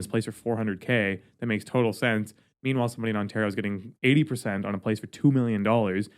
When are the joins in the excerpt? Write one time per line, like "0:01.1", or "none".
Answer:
none